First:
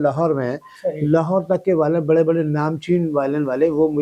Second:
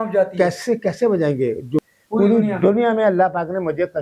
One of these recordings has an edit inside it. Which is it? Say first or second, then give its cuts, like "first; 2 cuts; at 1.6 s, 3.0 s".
second; 1 cut; at 1.8 s